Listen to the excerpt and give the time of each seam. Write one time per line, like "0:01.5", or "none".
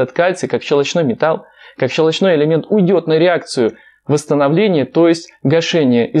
none

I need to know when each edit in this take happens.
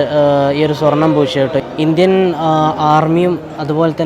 0:01.6

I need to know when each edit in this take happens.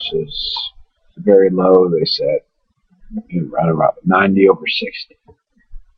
0:02.0

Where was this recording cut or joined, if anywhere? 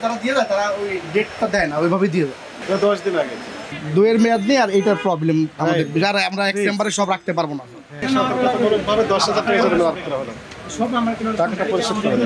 0:02.6
0:03.8
0:08.0

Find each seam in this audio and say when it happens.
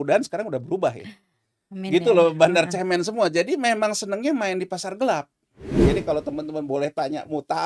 0:05.8

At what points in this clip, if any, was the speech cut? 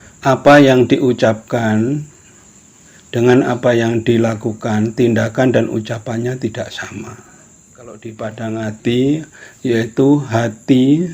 0:08.0

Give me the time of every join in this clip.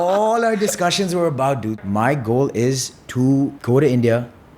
0:01.8
0:03.6

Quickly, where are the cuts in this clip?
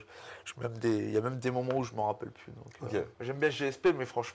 0:03.1

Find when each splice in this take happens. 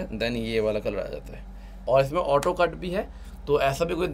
0:01.7

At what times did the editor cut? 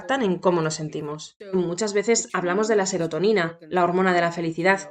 0:01.6

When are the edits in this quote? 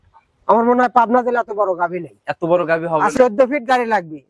0:03.1

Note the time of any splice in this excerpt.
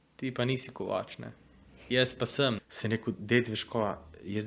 0:02.6

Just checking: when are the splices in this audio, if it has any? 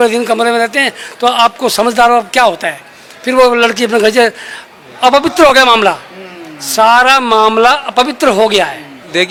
none

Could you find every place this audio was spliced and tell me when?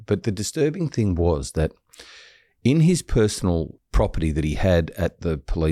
0:03.8

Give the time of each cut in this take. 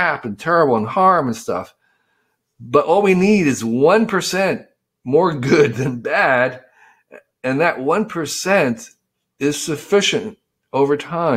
none

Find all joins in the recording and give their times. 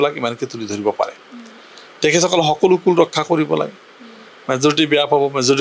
none

